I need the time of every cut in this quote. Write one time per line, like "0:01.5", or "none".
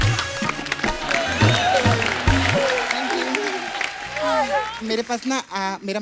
0:04.8